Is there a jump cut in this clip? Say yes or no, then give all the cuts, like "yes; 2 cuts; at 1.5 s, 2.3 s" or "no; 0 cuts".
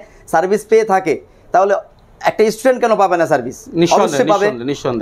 no; 0 cuts